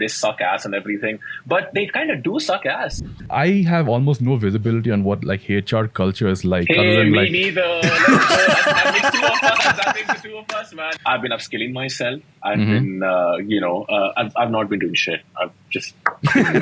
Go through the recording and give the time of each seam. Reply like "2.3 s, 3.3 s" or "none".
3.3 s, 10.9 s